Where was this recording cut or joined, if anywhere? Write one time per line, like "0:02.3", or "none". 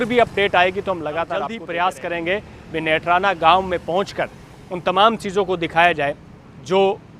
0:01.6

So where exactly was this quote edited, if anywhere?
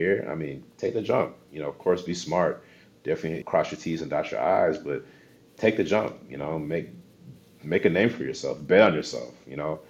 0:03.4

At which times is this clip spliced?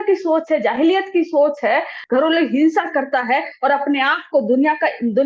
0:02.0

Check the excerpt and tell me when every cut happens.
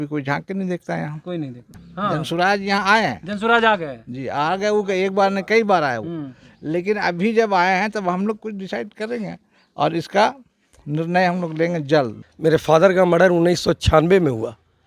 0:01.8
0:12.2

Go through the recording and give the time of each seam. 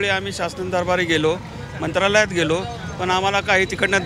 none

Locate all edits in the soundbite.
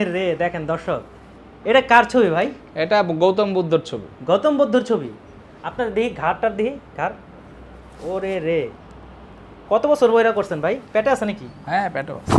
none

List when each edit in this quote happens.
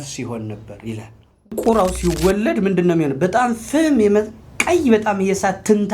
0:01.5

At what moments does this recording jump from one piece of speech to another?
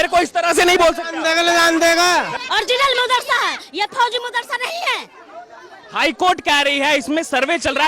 0:02.3

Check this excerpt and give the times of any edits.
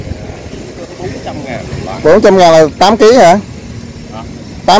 none

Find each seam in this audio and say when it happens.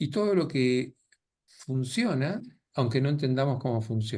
none

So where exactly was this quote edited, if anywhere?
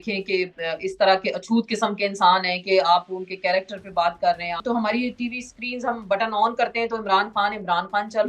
0:04.6

